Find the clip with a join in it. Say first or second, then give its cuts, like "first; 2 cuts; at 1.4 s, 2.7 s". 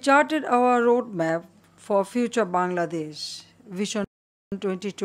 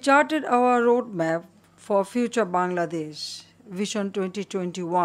second; 1 cut; at 4.0 s